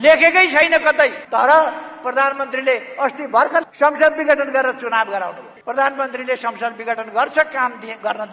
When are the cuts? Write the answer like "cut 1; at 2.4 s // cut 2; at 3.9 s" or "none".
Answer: cut 1; at 1.2 s // cut 2; at 3.7 s // cut 3; at 5.5 s